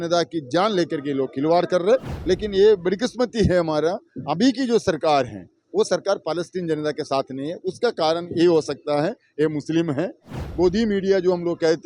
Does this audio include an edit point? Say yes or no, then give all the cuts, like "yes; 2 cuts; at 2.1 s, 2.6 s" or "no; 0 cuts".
yes; 2 cuts; at 2.1 s, 10.4 s